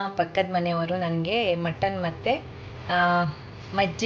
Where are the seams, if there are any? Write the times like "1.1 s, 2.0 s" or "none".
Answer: none